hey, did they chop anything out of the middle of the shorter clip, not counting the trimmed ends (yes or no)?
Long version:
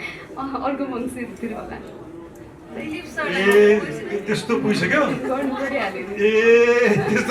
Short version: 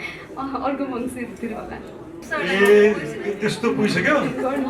yes